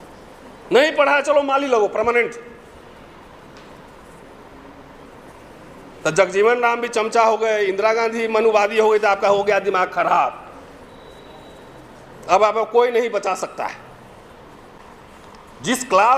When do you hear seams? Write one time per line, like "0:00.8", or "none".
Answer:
0:14.8

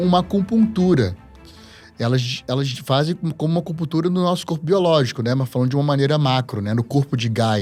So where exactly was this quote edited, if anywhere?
none

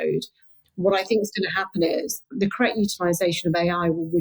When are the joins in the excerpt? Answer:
0:02.3

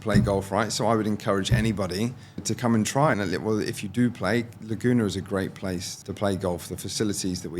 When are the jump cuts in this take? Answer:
0:02.4
0:03.2
0:06.0

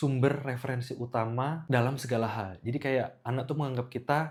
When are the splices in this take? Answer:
none

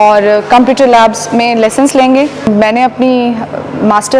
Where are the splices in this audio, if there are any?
0:02.4

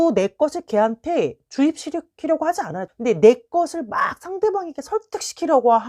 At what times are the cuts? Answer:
0:02.8

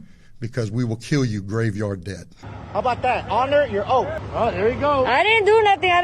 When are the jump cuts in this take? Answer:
0:02.3
0:04.2

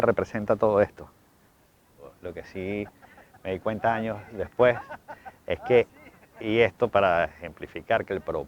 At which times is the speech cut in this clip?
0:02.1

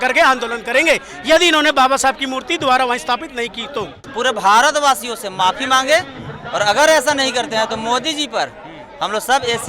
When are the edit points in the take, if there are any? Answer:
0:04.1

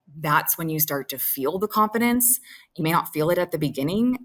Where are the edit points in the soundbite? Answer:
none

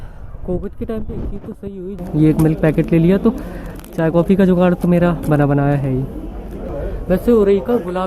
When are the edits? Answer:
0:01.9
0:06.7

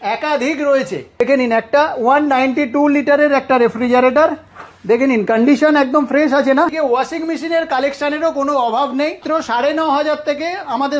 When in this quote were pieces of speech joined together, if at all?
0:01.2
0:06.7
0:09.2

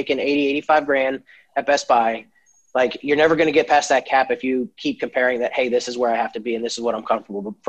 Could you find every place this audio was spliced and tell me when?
none

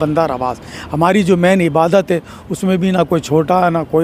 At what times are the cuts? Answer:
none

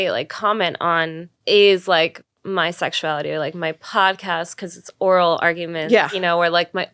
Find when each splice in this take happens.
0:01.3
0:02.3

